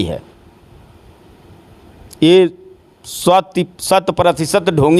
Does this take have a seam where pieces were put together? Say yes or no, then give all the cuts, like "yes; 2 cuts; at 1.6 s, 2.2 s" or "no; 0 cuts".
no; 0 cuts